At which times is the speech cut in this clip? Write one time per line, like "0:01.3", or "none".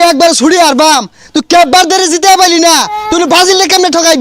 none